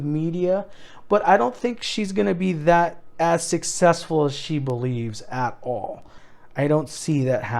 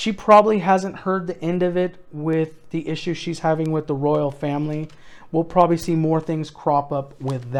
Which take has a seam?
first; 1 cut; at 6.1 s

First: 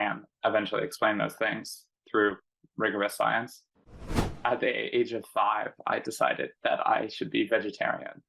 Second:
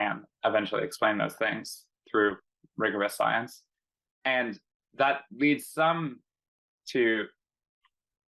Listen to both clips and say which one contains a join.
first; 1 cut; at 4.1 s

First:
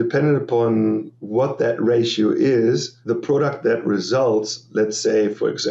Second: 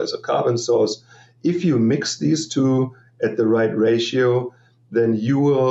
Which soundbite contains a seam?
first; 2 cuts; at 1.2 s, 2.9 s

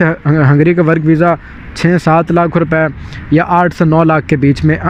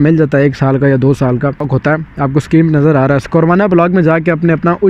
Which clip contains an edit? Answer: second; 1 cut; at 1.7 s

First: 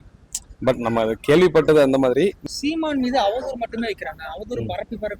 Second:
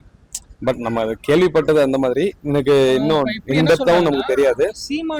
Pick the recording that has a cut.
first; 1 cut; at 2.5 s

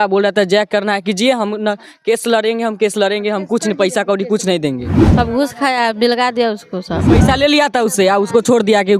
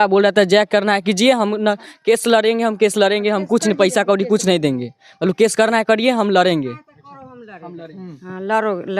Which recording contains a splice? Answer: first; 2 cuts; at 5.0 s, 7.0 s

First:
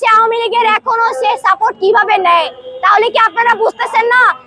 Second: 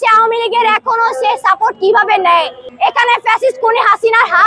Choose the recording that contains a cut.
second; 1 cut; at 2.7 s

